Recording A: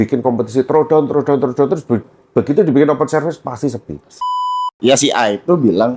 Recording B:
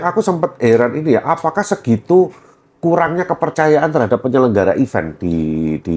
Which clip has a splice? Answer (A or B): A